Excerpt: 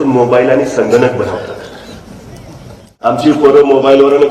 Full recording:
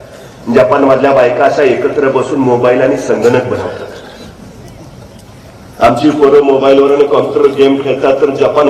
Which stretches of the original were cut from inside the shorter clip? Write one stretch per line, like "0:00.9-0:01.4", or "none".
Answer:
0:05.4-0:05.8